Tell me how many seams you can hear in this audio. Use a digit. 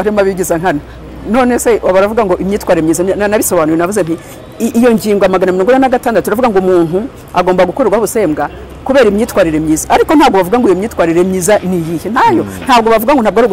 0